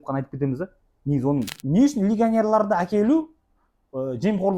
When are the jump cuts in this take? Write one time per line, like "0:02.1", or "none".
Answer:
0:01.5